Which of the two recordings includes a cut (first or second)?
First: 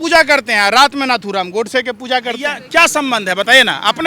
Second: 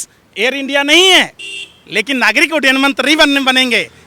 first